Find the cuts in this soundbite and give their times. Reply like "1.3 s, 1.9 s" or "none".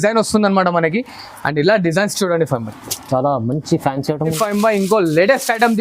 4.4 s